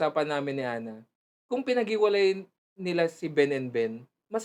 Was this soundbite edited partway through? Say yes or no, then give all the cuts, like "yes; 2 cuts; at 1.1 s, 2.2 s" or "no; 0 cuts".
no; 0 cuts